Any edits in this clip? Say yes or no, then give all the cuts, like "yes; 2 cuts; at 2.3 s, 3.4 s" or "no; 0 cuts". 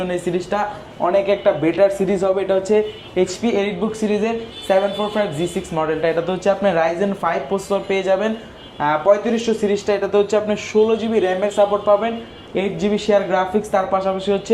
no; 0 cuts